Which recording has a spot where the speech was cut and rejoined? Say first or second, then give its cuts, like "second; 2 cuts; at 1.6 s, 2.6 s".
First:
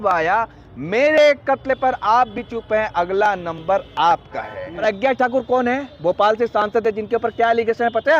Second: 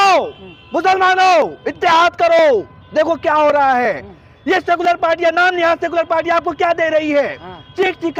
first; 1 cut; at 4.8 s